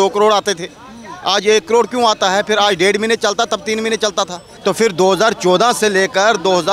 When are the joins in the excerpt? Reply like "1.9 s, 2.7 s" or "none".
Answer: 4.5 s